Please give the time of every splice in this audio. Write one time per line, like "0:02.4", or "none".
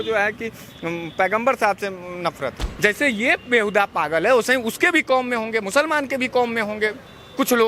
0:02.6

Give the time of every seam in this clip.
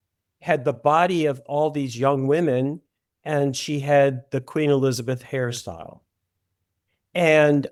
none

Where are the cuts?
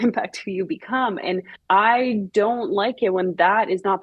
0:01.5

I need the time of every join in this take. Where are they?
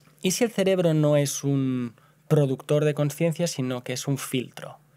none

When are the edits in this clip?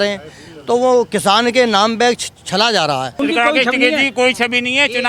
0:03.2

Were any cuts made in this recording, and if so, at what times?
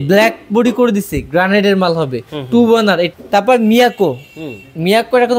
0:03.1

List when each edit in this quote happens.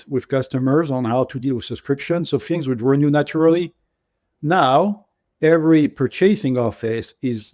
none

